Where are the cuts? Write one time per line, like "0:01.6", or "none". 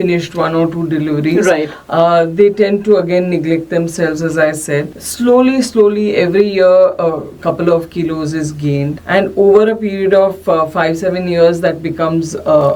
none